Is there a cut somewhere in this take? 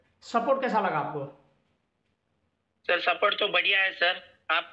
no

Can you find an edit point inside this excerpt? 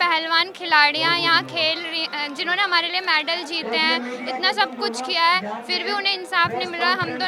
no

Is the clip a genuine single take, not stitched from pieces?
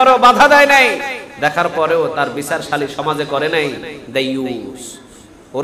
yes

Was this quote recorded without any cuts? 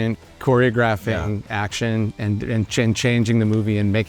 yes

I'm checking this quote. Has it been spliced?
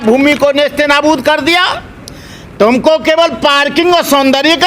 no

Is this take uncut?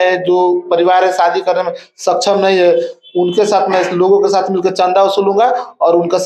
yes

